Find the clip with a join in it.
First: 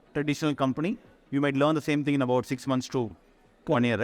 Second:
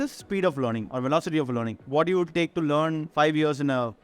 second; 2 cuts; at 1.8 s, 3.0 s

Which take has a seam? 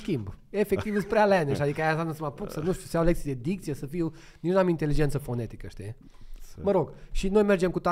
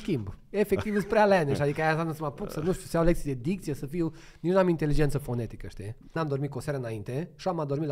second; 1 cut; at 6.1 s

